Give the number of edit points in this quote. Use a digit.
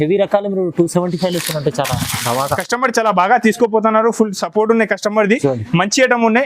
1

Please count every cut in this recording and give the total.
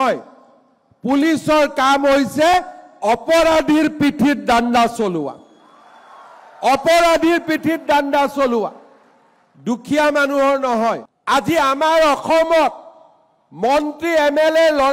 1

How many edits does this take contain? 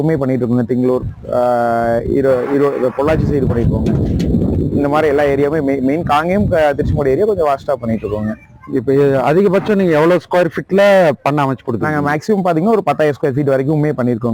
0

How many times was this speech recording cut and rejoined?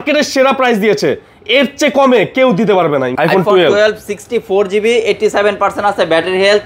1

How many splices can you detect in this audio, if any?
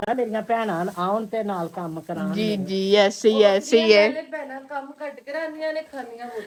0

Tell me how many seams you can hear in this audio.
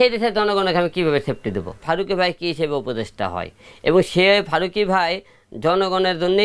1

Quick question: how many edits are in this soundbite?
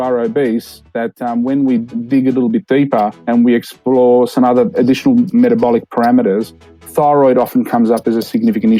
0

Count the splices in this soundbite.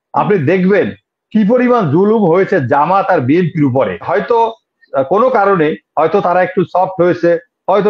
1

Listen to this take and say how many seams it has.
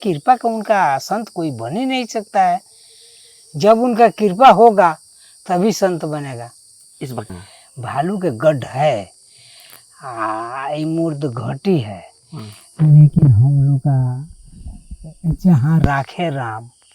1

